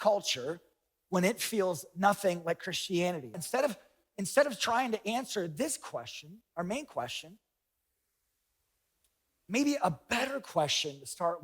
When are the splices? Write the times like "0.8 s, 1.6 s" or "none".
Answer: 3.4 s